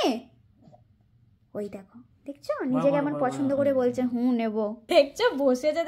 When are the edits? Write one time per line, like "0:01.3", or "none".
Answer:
0:04.9